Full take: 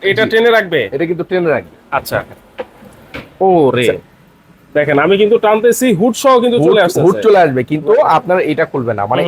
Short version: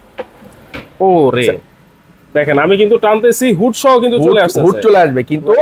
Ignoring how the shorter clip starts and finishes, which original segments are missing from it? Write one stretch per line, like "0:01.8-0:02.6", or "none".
none